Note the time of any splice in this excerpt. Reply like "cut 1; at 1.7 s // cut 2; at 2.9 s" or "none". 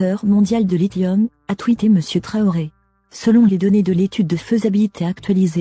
cut 1; at 1.4 s